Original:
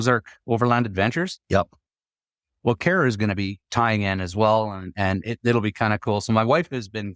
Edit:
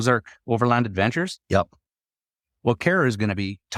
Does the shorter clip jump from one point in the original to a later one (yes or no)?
no